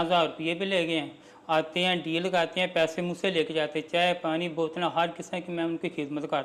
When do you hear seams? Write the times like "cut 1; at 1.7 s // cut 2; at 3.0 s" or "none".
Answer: none